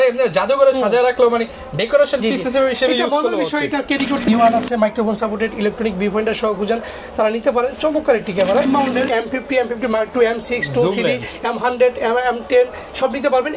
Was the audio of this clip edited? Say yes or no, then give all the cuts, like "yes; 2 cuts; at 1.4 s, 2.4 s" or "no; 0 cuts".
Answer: yes; 2 cuts; at 4.3 s, 8.6 s